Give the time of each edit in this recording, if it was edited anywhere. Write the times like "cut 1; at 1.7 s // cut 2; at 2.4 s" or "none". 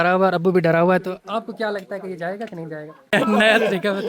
cut 1; at 3.1 s